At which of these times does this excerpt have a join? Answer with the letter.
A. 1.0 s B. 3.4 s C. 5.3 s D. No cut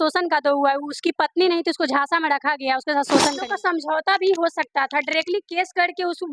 B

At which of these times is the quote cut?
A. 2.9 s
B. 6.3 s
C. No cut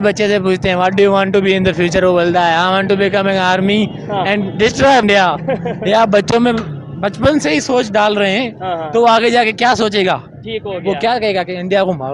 C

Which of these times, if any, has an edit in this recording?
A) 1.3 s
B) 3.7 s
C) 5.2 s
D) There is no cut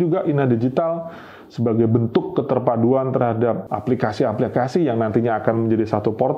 B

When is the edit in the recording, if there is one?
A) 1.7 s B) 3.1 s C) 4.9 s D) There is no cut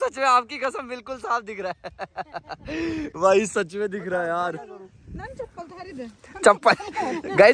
D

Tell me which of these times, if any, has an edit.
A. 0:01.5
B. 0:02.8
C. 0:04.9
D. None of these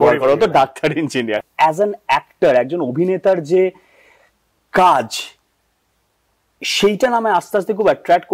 A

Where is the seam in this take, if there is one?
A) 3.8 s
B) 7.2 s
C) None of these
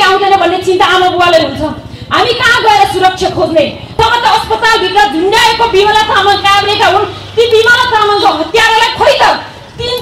A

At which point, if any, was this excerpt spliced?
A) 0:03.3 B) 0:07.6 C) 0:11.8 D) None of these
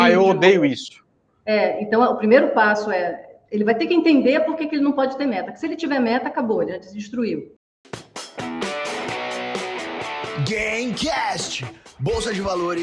B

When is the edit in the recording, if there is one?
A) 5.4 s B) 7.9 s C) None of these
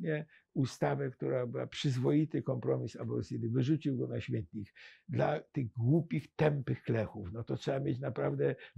C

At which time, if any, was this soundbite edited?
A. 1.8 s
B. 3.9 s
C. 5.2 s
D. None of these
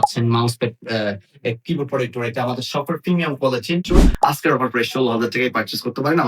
B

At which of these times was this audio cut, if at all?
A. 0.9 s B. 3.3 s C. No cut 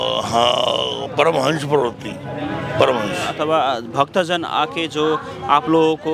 B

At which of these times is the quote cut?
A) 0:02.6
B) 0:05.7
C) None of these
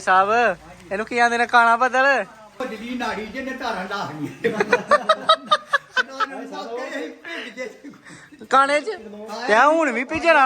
A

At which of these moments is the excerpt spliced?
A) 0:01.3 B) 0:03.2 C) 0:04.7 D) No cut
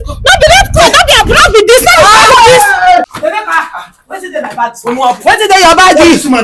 B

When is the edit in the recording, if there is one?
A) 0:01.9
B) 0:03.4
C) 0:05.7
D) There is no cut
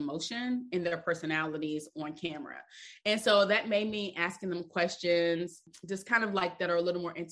C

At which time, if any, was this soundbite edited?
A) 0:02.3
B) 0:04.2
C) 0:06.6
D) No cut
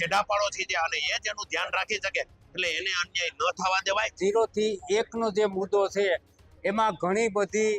B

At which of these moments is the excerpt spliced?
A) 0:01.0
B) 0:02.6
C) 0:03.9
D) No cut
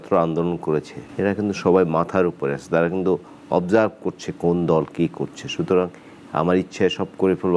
A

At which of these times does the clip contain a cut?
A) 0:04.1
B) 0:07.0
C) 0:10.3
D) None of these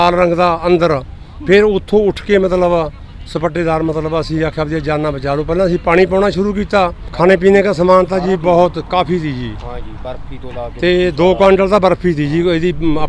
B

